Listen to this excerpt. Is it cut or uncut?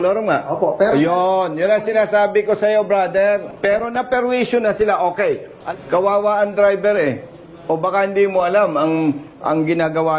cut